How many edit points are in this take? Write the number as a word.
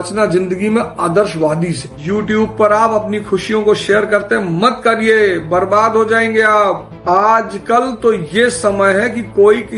one